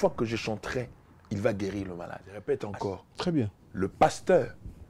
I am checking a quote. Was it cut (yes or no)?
yes